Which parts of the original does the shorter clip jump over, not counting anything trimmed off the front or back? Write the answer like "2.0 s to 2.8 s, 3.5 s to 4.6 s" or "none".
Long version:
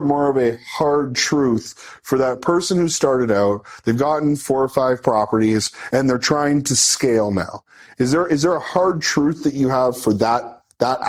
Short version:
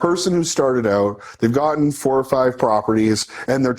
none